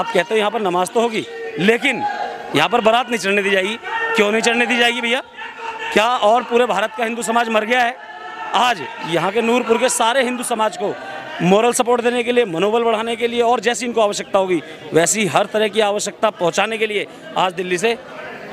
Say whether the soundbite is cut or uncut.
uncut